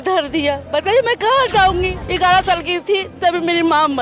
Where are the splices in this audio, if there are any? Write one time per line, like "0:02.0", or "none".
0:02.0